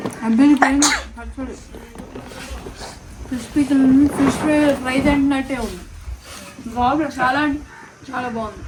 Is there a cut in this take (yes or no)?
no